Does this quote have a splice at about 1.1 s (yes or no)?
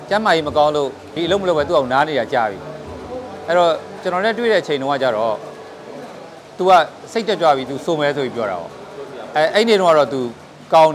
yes